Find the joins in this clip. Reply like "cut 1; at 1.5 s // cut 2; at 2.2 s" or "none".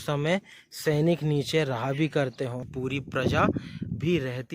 cut 1; at 2.7 s